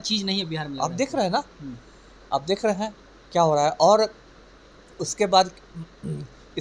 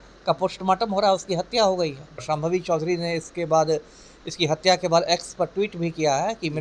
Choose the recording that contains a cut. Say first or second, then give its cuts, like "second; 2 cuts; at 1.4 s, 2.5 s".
second; 1 cut; at 2.2 s